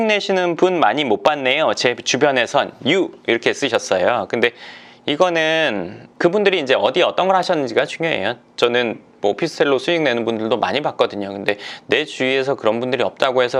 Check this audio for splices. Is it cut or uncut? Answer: uncut